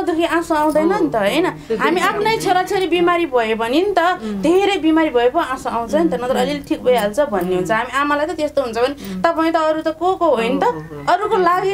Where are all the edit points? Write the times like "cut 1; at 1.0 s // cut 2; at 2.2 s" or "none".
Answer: none